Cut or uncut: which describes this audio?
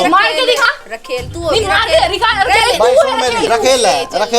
cut